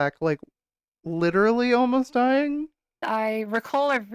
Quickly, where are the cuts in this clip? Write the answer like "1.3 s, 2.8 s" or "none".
3.0 s